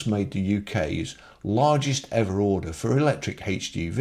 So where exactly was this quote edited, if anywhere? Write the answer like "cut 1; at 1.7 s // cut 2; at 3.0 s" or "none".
none